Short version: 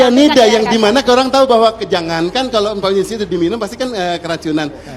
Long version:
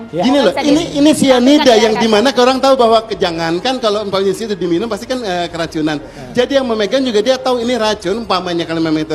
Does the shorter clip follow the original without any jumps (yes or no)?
yes